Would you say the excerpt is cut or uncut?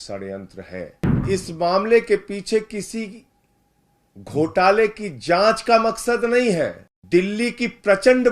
cut